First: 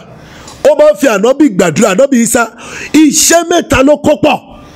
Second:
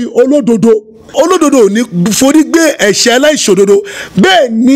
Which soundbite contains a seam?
second; 1 cut; at 1.1 s

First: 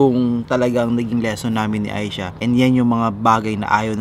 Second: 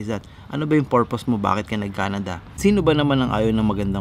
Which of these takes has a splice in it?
second; 1 cut; at 2.4 s

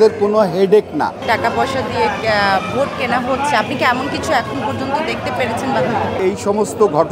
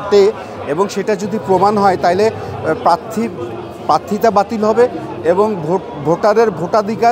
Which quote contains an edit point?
first; 2 cuts; at 1.2 s, 6.2 s

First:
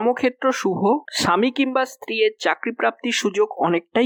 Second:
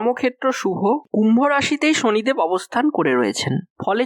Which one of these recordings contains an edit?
second; 1 cut; at 1.1 s

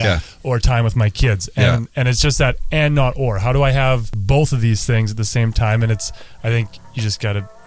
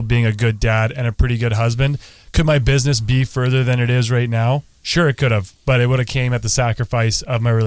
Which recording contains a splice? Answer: first; 1 cut; at 4.1 s

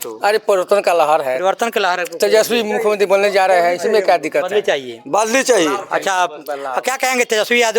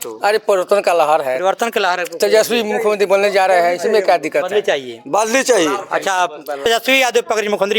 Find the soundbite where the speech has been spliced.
second; 1 cut; at 6.6 s

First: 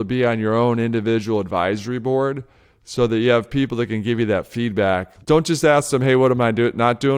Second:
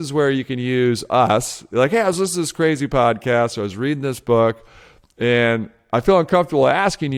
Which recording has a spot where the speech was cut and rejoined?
first; 1 cut; at 5.1 s

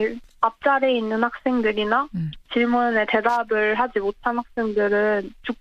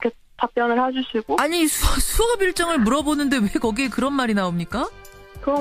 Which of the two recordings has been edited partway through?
second; 1 cut; at 3.2 s

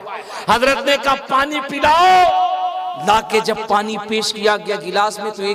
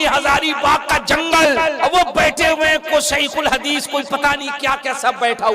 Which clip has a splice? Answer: second; 1 cut; at 1.8 s

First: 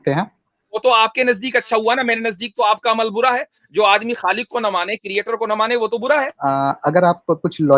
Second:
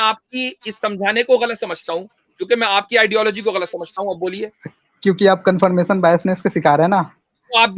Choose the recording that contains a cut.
first; 1 cut; at 6.3 s

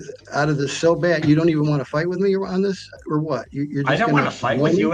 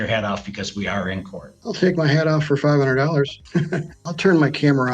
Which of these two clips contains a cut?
second; 1 cut; at 3.9 s

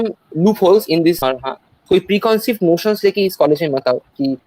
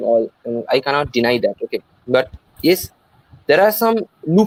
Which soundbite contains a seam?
first; 1 cut; at 1.5 s

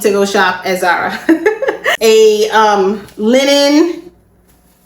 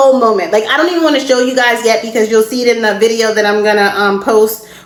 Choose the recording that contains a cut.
first; 1 cut; at 1.9 s

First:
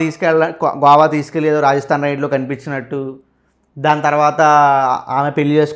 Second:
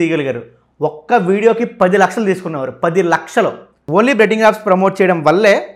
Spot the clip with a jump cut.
second; 1 cut; at 3.7 s

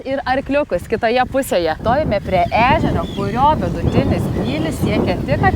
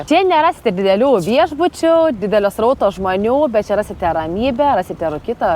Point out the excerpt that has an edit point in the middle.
first; 1 cut; at 1.8 s

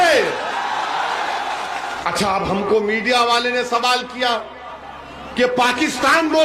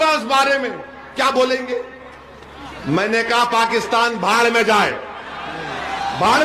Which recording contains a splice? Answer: first; 1 cut; at 2.0 s

